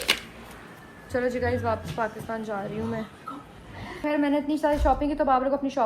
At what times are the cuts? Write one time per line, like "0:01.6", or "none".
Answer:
0:04.0